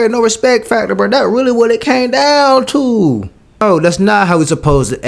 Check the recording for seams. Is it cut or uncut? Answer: cut